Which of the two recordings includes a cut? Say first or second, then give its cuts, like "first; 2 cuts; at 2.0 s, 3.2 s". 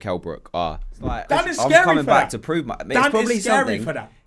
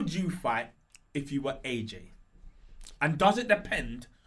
first; 1 cut; at 1.2 s